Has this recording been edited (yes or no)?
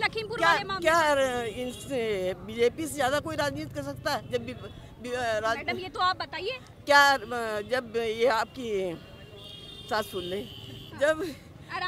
no